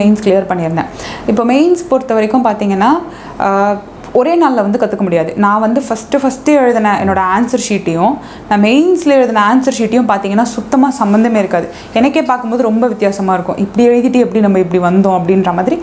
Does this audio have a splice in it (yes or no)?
no